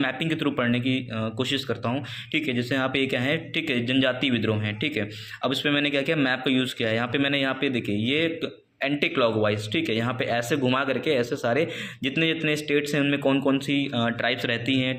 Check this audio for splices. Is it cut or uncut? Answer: uncut